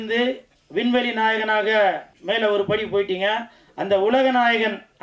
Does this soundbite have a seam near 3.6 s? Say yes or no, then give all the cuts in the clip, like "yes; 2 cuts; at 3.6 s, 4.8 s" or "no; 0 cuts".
no; 1 cut; at 2.1 s